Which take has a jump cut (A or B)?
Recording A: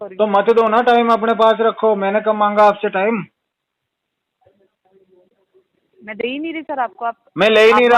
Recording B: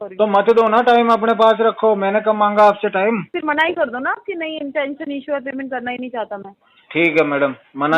B